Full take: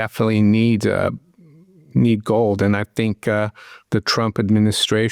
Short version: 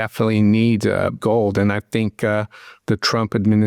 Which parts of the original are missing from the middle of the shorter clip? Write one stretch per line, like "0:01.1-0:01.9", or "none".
0:01.2-0:02.2